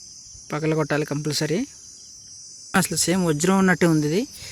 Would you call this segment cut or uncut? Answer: cut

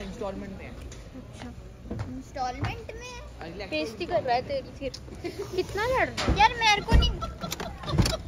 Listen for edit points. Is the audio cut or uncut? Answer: uncut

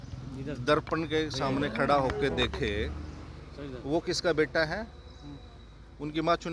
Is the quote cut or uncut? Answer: uncut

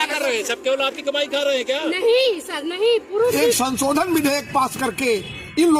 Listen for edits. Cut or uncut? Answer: cut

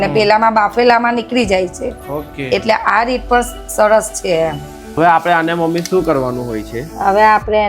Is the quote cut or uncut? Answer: cut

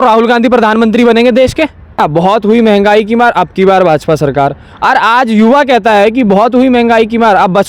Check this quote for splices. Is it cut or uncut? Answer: cut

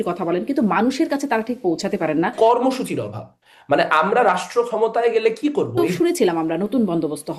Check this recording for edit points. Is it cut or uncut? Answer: cut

